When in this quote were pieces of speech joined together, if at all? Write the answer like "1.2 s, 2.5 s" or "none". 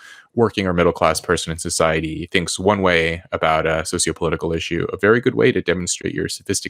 none